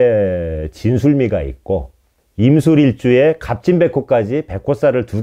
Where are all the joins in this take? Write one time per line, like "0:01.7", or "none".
none